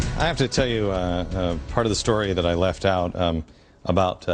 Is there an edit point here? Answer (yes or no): yes